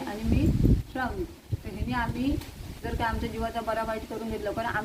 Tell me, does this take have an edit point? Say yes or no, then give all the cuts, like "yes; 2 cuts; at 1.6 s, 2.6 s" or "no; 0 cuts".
no; 0 cuts